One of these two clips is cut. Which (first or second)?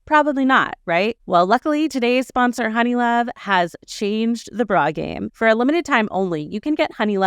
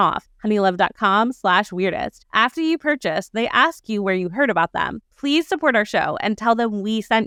first